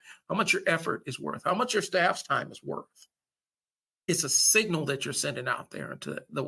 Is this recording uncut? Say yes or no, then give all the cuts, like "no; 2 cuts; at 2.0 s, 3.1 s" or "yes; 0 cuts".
yes; 0 cuts